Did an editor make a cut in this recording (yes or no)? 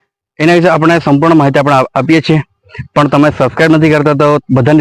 no